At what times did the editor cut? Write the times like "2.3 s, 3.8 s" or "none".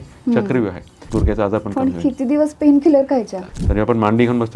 1.0 s, 3.4 s